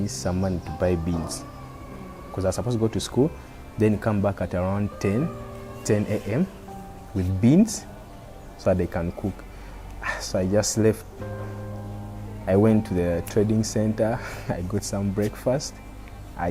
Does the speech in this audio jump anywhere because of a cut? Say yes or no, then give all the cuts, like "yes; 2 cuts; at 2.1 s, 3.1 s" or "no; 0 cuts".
no; 0 cuts